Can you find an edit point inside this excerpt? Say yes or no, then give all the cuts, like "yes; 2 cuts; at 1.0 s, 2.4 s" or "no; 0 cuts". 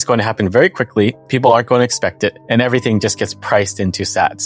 yes; 1 cut; at 2.4 s